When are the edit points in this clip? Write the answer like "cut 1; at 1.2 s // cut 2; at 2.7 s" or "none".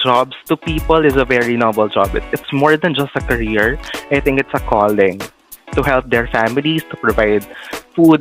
cut 1; at 2.3 s